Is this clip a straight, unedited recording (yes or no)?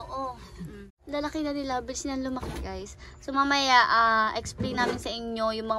no